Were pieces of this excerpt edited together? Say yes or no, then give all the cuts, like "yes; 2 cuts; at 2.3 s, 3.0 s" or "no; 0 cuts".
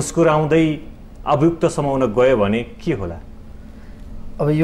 no; 0 cuts